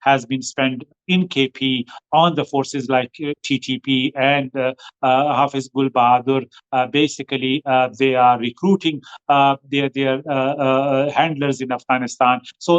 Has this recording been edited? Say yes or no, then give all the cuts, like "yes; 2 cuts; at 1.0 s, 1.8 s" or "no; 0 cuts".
no; 0 cuts